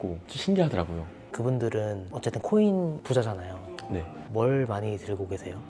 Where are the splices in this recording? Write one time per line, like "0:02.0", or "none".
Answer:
none